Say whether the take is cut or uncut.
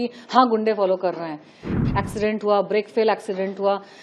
cut